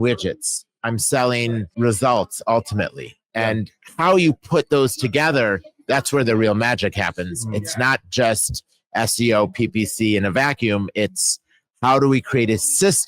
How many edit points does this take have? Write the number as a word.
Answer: one